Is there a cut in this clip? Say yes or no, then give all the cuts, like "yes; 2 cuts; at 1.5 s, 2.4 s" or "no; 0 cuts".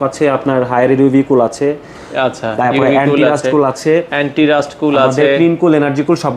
no; 0 cuts